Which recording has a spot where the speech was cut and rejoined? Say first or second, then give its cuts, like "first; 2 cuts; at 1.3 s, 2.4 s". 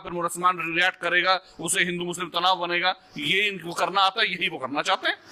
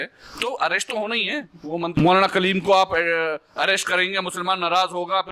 second; 1 cut; at 1.9 s